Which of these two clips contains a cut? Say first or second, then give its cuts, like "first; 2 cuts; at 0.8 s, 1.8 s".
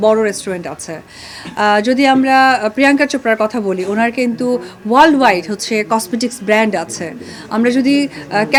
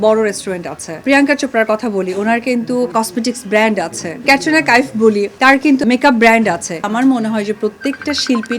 second; 5 cuts; at 1.0 s, 2.9 s, 4.2 s, 5.6 s, 6.9 s